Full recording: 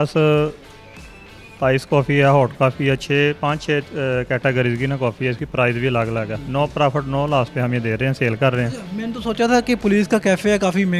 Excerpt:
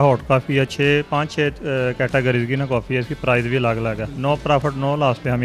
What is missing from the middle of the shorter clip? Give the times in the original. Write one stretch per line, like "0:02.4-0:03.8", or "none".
none